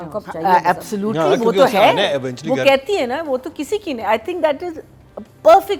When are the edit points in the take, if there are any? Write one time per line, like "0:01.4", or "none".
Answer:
none